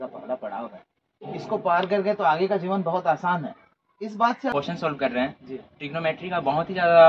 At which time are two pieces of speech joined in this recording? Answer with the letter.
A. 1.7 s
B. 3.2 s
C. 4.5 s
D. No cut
C